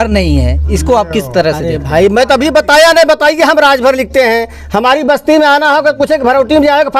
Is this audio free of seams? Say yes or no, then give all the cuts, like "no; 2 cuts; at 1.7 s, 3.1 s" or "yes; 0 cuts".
yes; 0 cuts